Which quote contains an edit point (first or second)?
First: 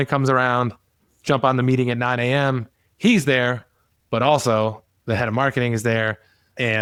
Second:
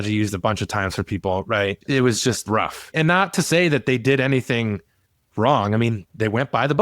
second